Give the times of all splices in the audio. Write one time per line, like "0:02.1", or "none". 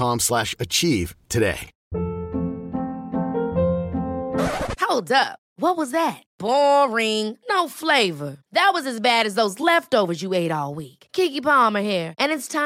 0:01.7